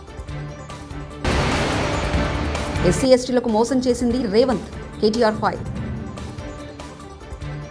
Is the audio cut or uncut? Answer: cut